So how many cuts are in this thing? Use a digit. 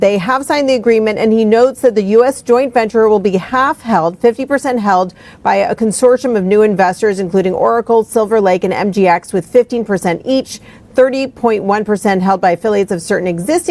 2